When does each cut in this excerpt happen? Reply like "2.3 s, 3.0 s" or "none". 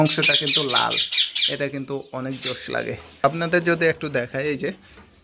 3.2 s